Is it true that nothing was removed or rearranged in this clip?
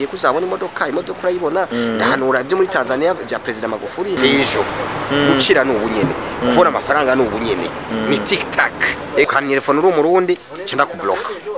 no; 2 cuts; at 4.2 s, 9.2 s

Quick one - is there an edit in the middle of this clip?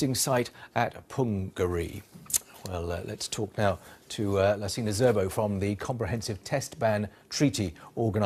no; 0 cuts

